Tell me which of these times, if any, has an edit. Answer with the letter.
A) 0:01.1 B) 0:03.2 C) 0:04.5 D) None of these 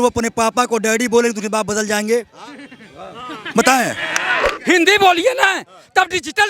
C